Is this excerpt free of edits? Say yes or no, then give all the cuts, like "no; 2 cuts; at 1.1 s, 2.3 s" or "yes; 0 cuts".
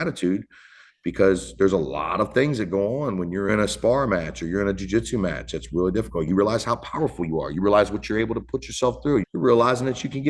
no; 3 cuts; at 3.5 s, 6.3 s, 9.3 s